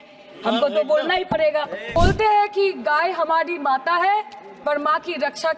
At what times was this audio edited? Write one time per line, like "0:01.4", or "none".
0:02.0